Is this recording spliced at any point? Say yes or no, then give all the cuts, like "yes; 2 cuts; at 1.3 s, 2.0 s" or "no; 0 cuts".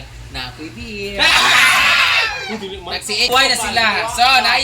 yes; 1 cut; at 3.3 s